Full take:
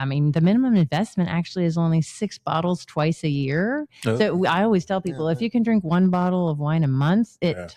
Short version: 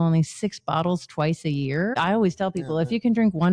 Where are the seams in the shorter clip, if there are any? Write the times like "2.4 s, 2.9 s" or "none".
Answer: 2.0 s